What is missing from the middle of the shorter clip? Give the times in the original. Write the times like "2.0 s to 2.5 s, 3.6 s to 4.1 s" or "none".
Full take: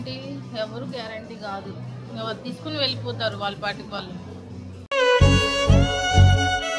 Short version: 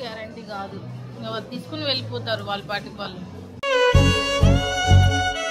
4.4 s to 4.7 s